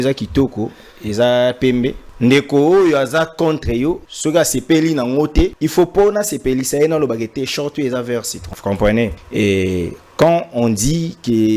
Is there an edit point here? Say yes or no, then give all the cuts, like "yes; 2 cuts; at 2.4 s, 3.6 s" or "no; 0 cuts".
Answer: yes; 5 cuts; at 2.0 s, 4.1 s, 5.6 s, 8.4 s, 9.2 s